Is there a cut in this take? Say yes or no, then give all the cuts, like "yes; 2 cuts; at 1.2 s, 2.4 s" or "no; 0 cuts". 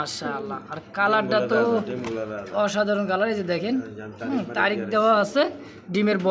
no; 0 cuts